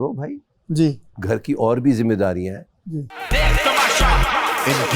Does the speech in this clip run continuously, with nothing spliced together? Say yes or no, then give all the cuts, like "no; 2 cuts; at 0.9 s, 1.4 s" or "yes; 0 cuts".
no; 1 cut; at 3.1 s